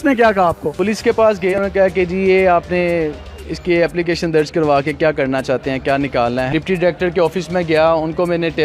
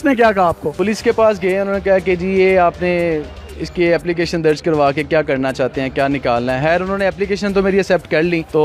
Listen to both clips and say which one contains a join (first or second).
first